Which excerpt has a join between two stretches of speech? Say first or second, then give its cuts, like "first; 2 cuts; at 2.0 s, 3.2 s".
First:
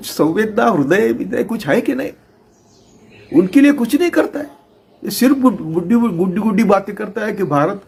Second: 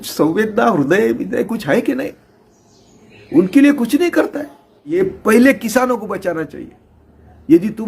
second; 1 cut; at 5.0 s